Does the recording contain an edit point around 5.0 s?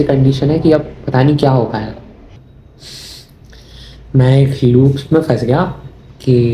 no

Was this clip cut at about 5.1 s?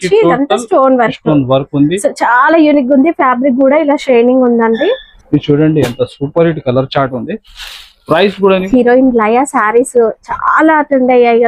yes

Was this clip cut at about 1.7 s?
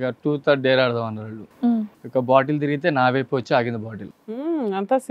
yes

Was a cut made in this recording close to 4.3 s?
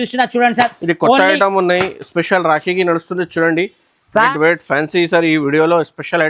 yes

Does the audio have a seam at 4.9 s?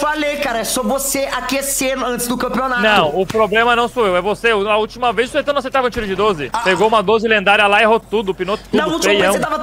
no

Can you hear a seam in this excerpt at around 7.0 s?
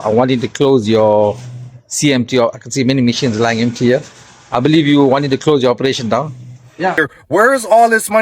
yes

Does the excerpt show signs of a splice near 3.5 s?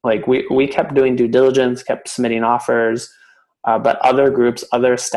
no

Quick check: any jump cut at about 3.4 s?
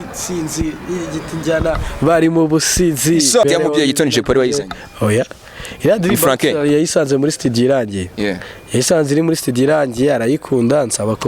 yes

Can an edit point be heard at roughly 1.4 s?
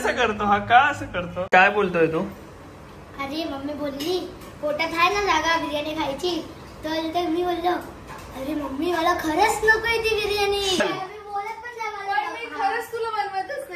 yes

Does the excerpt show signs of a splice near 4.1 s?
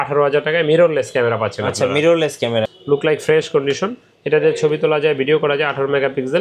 no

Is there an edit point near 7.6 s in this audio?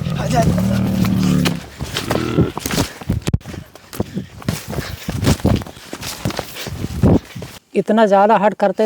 yes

